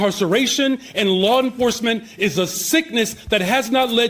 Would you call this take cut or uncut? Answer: uncut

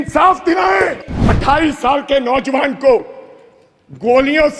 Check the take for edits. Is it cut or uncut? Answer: cut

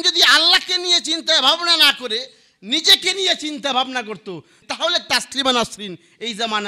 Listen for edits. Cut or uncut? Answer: cut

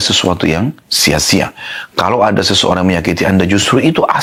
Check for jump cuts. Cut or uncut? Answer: uncut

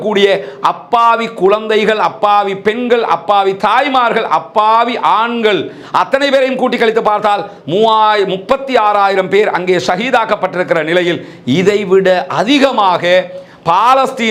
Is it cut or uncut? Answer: uncut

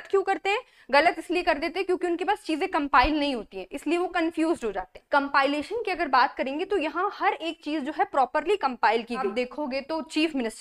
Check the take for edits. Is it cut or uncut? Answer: cut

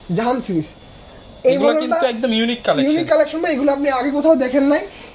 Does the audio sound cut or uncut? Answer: uncut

